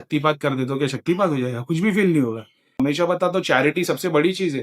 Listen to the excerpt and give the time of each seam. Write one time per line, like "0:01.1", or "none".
0:02.8